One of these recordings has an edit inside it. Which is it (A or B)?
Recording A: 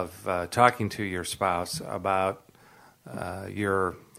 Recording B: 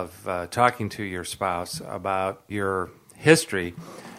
B